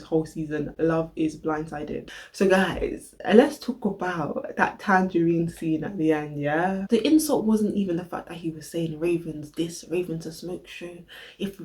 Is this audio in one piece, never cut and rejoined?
no; 2 cuts; at 2.0 s, 6.8 s

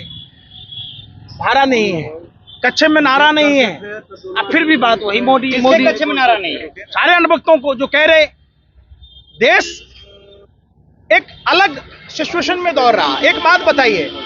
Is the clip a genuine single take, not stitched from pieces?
yes; 0 cuts

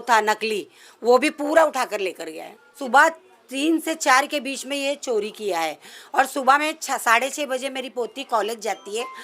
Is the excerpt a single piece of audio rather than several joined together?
no; 1 cut; at 2.8 s

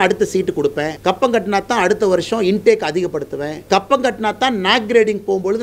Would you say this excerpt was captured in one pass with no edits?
no; 2 cuts; at 0.9 s, 3.5 s

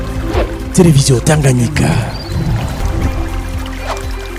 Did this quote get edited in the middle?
no; 0 cuts

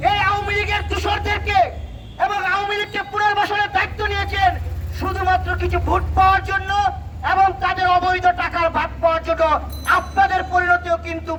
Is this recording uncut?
yes; 0 cuts

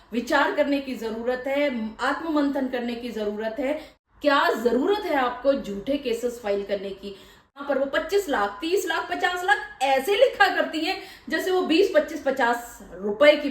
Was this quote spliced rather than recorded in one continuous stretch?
yes; 2 cuts; at 3.9 s, 7.6 s

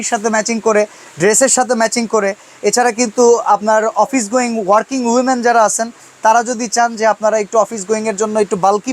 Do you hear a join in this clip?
no; 0 cuts

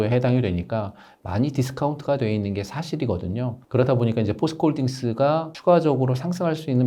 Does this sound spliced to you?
no; 0 cuts

